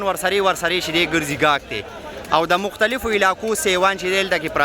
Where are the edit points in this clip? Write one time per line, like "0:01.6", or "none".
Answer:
none